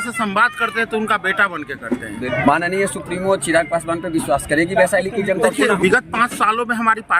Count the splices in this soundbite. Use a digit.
2